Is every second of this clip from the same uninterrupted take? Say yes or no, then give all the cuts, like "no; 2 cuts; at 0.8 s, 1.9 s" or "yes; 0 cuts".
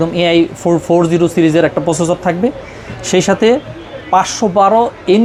yes; 0 cuts